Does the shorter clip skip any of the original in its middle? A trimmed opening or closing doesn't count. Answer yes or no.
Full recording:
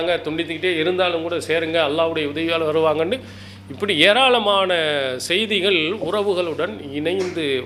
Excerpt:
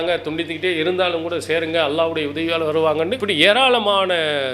yes